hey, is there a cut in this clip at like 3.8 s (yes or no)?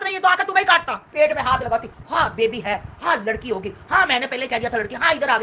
no